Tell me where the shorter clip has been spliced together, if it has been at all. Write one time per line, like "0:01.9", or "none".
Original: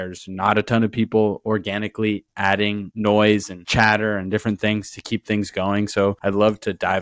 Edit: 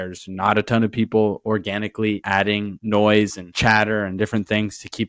0:02.2